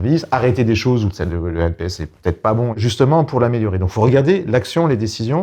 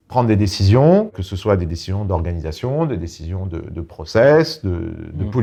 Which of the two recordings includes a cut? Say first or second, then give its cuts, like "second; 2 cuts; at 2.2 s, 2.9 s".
first; 1 cut; at 2.8 s